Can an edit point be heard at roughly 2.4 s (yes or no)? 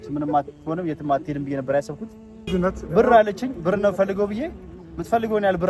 yes